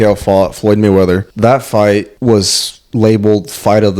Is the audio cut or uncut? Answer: cut